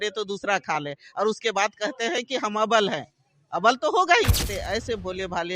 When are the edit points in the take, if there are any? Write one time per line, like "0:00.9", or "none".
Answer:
0:04.5